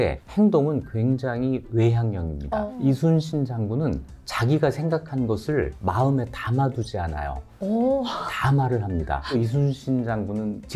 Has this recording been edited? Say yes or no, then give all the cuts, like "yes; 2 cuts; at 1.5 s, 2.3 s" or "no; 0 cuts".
yes; 1 cut; at 9.3 s